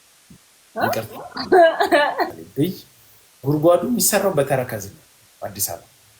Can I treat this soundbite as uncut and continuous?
no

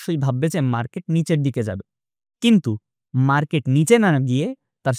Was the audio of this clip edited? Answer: no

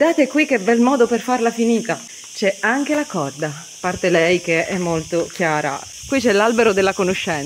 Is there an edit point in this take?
no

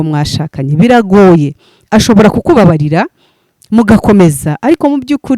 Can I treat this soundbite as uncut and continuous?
yes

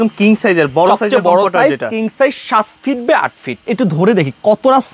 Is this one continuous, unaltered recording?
no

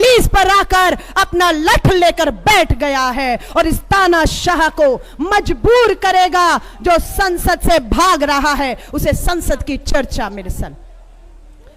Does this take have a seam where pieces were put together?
no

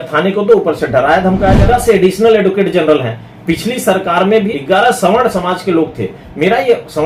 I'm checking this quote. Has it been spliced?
yes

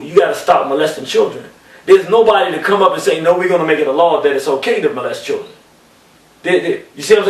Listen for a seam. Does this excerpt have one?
no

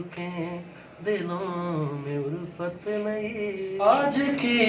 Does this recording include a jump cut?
yes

